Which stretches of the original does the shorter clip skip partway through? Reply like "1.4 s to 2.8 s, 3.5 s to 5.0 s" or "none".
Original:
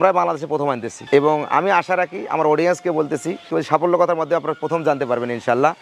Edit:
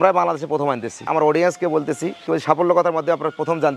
1.0 s to 2.2 s